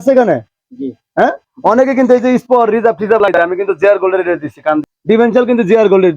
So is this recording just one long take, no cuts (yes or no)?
no